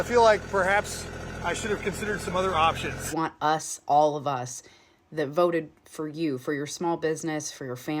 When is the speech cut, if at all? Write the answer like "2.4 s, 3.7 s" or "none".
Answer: 3.1 s